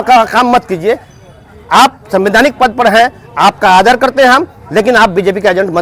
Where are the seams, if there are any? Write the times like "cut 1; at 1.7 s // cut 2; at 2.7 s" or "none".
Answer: none